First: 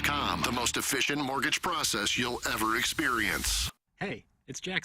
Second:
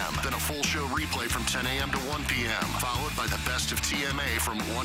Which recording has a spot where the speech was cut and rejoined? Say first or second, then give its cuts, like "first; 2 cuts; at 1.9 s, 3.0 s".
first; 1 cut; at 3.8 s